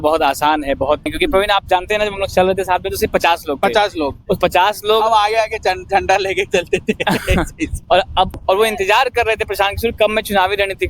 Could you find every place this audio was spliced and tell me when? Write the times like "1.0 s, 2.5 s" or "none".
1.1 s, 8.3 s